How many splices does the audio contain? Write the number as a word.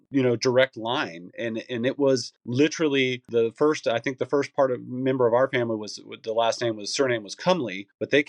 one